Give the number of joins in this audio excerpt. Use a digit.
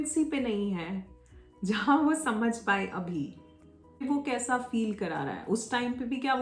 1